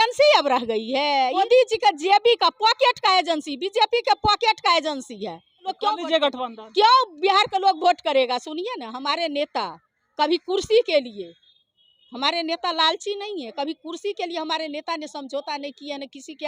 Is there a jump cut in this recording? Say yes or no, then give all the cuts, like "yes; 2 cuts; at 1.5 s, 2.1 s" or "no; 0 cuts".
yes; 2 cuts; at 1.4 s, 5.7 s